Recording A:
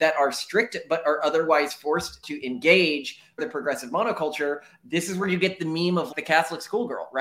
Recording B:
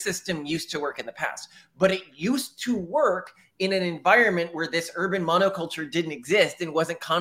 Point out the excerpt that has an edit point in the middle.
A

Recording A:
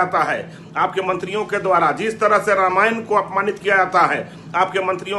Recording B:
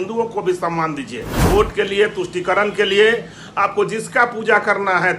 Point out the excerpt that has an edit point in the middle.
B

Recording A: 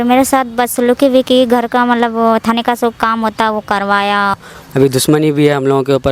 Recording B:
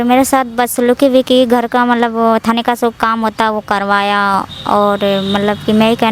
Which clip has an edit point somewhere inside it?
A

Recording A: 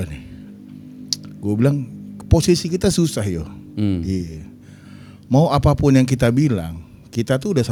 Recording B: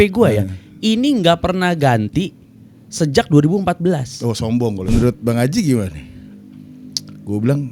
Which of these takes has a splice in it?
B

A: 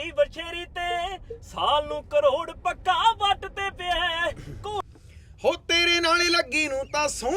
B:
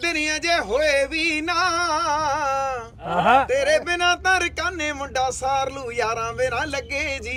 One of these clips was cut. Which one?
A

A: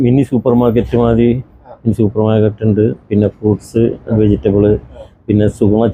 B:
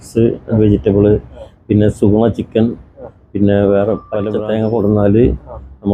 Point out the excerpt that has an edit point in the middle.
B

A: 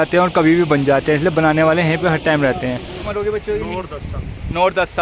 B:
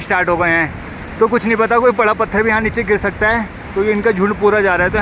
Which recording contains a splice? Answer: A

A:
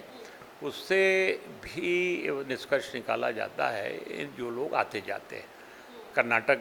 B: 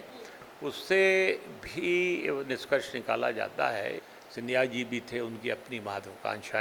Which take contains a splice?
B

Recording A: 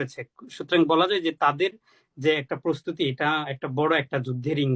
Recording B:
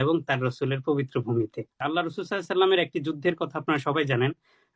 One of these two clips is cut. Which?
B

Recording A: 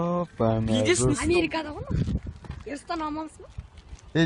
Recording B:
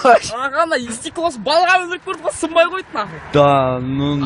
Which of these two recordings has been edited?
B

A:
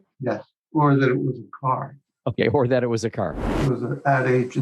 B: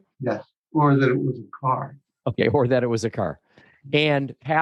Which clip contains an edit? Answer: A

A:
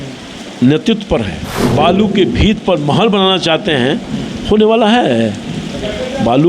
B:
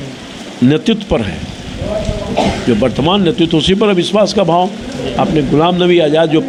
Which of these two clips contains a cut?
A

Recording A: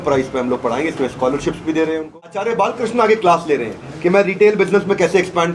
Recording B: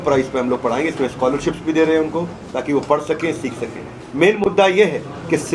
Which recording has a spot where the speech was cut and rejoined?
A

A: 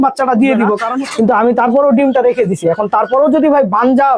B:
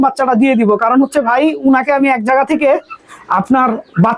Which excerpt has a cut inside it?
A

